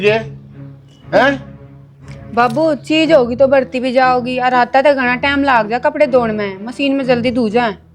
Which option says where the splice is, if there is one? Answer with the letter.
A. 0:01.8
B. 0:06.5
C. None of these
C